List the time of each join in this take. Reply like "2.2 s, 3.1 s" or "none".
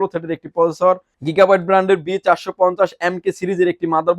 1.2 s